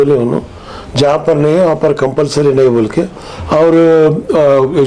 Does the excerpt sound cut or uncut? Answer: uncut